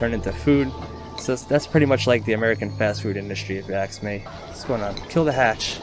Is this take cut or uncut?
cut